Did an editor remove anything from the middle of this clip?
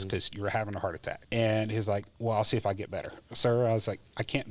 yes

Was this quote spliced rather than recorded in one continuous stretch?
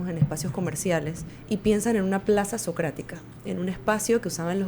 yes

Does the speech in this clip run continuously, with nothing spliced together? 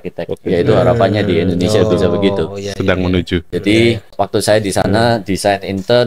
no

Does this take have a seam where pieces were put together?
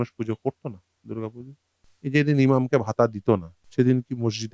yes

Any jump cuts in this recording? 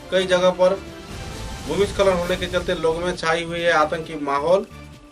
no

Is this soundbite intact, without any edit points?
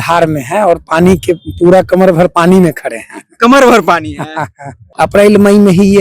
no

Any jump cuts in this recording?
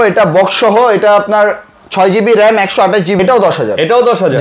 yes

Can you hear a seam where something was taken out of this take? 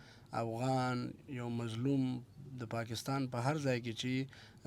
no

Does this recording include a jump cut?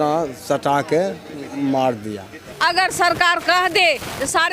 yes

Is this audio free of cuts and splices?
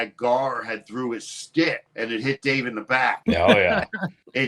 no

